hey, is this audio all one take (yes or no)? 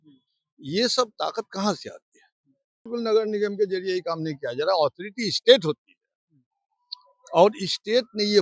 no